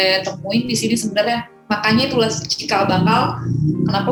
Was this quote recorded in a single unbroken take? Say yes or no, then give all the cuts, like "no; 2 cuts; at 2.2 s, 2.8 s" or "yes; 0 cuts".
yes; 0 cuts